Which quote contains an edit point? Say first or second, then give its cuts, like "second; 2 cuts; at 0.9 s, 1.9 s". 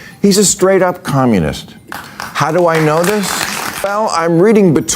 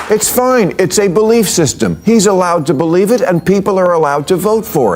first; 1 cut; at 3.9 s